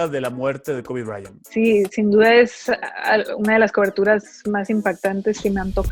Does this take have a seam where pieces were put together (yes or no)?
yes